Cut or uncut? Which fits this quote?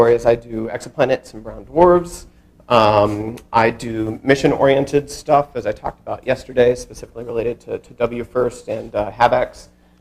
cut